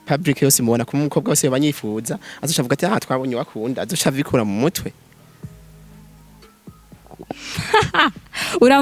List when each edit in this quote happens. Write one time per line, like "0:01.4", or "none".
none